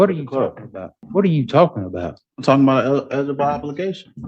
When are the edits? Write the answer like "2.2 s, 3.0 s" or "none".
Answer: 1.0 s